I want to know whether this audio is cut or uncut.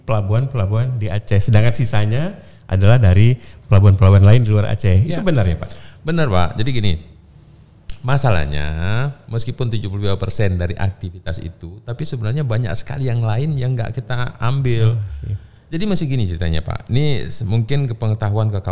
uncut